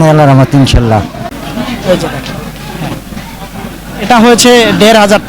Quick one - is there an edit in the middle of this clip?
yes; 1 cut; at 1.2 s

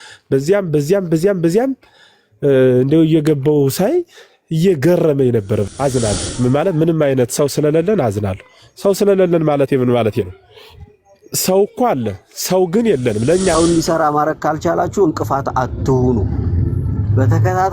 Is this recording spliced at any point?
yes; 2 cuts; at 5.7 s, 13.6 s

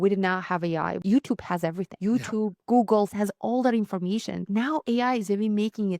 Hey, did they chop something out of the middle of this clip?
yes; 4 cuts; at 1.0 s, 1.9 s, 3.1 s, 4.5 s

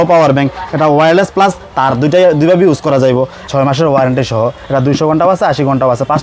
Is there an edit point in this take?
yes; 1 cut; at 3.4 s

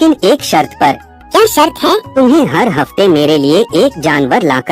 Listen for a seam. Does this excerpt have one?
yes; 2 cuts; at 1.1 s, 2.1 s

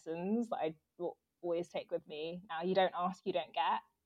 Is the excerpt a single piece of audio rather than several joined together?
yes; 0 cuts

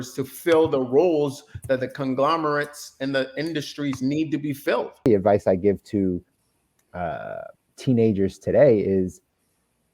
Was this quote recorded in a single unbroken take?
no; 1 cut; at 5.1 s

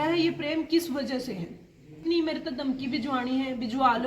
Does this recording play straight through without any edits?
no; 1 cut; at 2.0 s

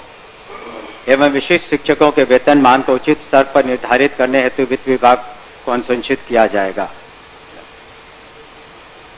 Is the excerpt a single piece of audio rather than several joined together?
yes; 0 cuts

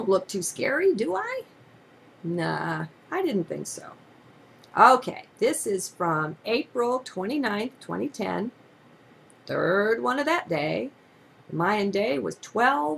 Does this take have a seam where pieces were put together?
yes; 1 cut; at 2.9 s

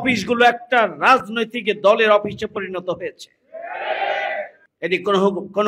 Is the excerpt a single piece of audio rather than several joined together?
no; 1 cut; at 4.6 s

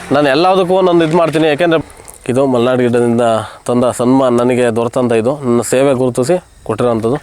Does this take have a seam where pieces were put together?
yes; 1 cut; at 1.8 s

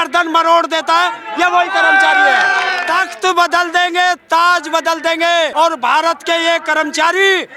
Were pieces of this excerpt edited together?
yes; 2 cuts; at 2.8 s, 5.5 s

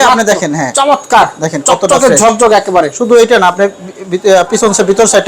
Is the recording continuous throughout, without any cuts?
yes; 0 cuts

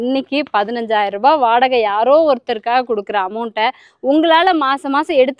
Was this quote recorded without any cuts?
yes; 0 cuts

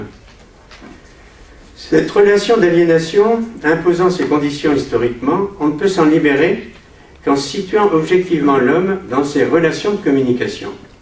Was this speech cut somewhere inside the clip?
no; 0 cuts

